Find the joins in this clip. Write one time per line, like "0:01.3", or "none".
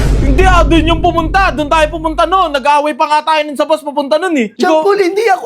0:04.5

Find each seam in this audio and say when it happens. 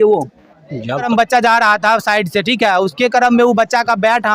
0:01.1

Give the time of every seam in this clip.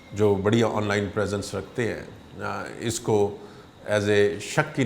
none

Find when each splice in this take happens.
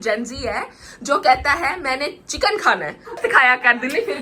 0:03.2

